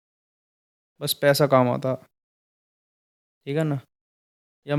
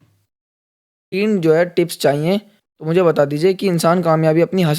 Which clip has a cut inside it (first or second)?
second